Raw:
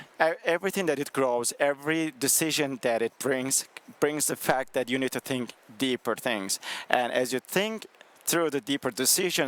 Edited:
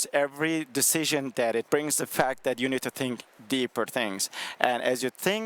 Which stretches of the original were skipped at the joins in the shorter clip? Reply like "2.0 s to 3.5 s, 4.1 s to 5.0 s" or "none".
3.1 s to 4.0 s